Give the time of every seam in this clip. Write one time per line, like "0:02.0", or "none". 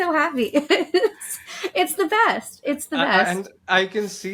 none

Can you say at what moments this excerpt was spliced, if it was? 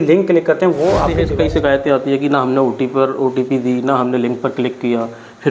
0:01.3

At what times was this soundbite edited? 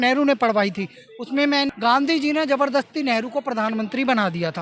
0:01.7

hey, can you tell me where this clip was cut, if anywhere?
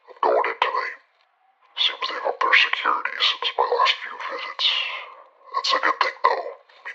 none

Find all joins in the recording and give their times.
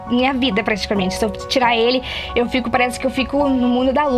none

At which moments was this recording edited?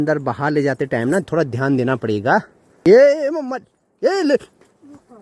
none

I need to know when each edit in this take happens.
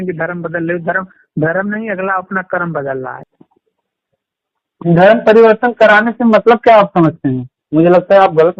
0:03.2

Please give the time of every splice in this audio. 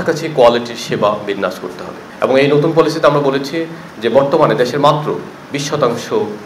none

